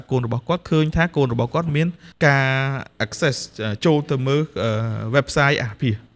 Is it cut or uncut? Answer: cut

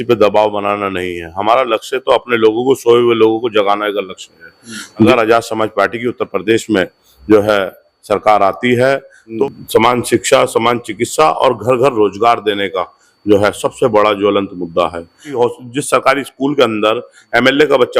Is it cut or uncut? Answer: cut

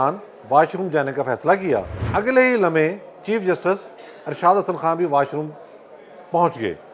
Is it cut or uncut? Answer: cut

